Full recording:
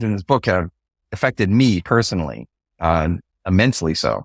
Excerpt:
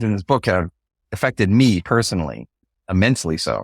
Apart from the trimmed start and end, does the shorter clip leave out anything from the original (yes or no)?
yes